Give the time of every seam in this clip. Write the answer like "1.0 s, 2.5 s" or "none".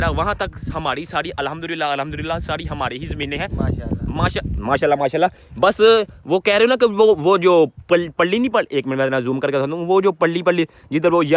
none